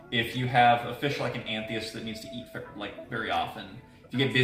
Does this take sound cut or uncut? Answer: uncut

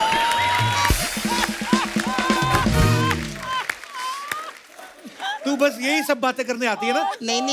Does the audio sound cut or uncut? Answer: uncut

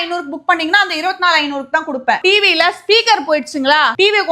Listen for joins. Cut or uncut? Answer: cut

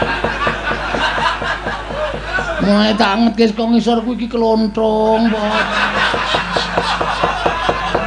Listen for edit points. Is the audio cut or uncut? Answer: uncut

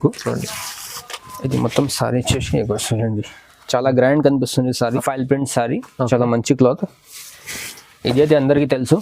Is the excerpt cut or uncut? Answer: cut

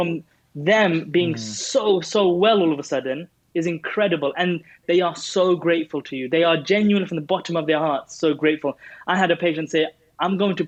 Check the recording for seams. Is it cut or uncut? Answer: uncut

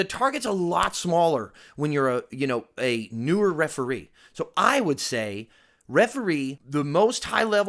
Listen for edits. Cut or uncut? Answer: cut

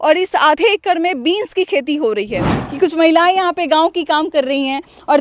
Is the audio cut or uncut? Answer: cut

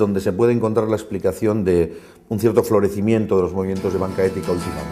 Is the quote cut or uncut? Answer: cut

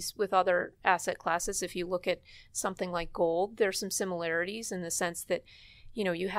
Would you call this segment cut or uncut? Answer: uncut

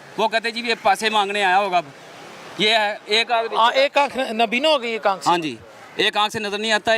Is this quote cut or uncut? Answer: uncut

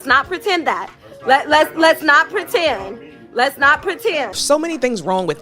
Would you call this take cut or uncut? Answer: cut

